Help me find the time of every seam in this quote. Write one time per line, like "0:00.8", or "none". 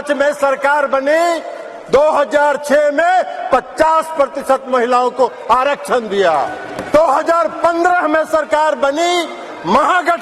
0:06.8